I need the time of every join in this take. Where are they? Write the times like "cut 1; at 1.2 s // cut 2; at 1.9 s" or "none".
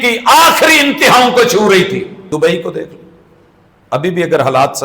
cut 1; at 2.2 s